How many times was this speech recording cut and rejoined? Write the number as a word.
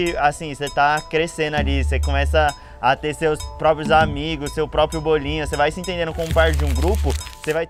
zero